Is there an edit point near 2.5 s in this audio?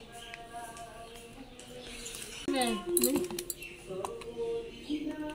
yes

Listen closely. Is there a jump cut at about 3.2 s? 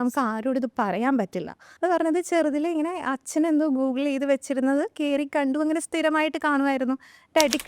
no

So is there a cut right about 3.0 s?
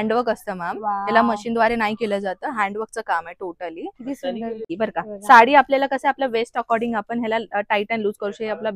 no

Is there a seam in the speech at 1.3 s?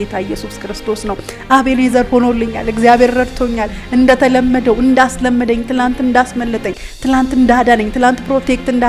yes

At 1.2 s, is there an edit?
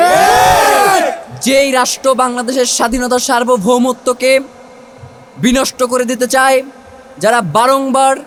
no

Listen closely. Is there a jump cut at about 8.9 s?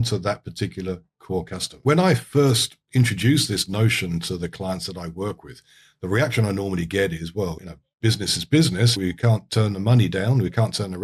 yes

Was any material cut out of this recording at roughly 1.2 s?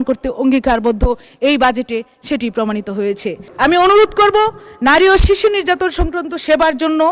no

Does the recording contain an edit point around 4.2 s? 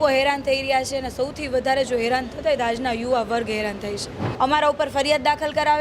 yes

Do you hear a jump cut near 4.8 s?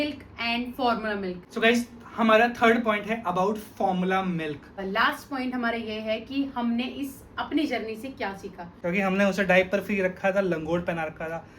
yes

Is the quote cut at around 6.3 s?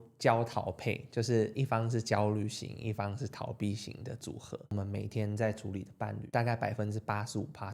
yes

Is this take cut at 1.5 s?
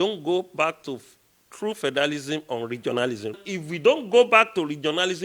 no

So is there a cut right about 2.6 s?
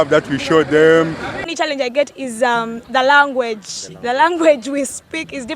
no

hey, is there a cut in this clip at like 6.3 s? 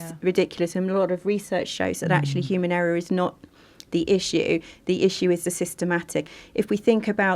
yes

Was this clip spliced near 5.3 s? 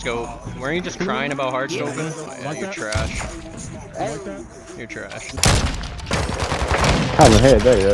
yes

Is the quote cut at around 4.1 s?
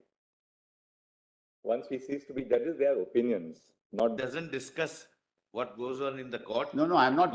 yes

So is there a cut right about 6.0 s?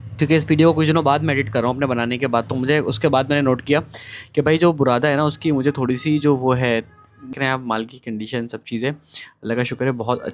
no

